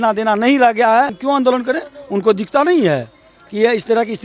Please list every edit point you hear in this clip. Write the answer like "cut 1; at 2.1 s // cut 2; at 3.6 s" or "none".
cut 1; at 1.2 s